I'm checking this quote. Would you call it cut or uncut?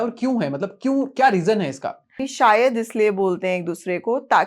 cut